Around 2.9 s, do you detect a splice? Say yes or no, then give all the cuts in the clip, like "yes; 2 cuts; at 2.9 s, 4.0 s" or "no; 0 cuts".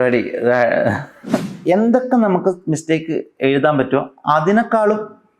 no; 1 cut; at 1.5 s